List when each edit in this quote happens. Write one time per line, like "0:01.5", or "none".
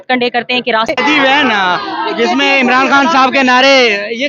0:00.9